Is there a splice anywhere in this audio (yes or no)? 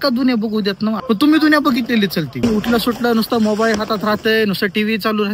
yes